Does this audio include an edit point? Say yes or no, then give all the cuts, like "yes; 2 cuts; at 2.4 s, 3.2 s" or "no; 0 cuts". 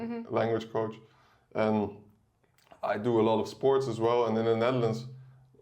no; 0 cuts